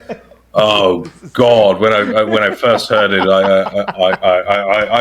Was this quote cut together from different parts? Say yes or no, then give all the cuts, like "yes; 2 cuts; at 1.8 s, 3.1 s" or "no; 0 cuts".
no; 0 cuts